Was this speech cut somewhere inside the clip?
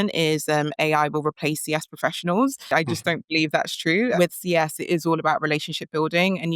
yes; 2 cuts; at 2.7 s, 4.1 s

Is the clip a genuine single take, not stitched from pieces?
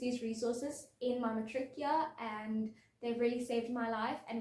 yes; 0 cuts

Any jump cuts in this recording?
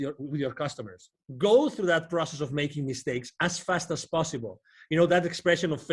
yes; 1 cut; at 1.2 s

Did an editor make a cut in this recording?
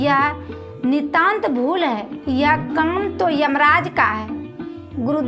no; 0 cuts

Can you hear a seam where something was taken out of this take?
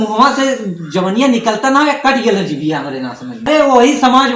yes; 1 cut; at 3.5 s

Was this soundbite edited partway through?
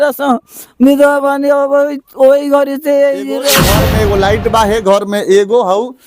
yes; 1 cut; at 3.6 s

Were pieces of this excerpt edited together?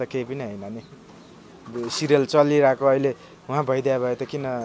no; 0 cuts

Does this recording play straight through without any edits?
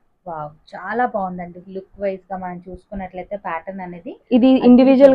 yes; 0 cuts

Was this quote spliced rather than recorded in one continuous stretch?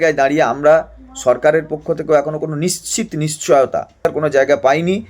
yes; 1 cut; at 4.1 s

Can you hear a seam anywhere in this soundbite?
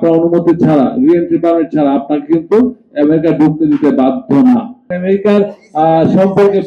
yes; 1 cut; at 4.9 s

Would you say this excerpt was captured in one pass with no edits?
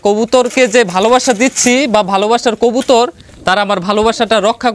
yes; 0 cuts

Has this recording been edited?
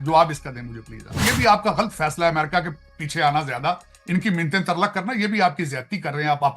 yes; 1 cut; at 1.1 s

